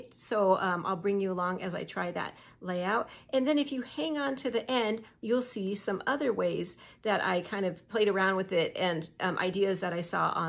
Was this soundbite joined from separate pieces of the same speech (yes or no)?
yes